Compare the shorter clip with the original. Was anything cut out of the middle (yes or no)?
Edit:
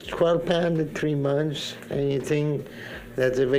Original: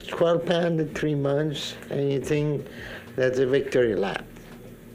no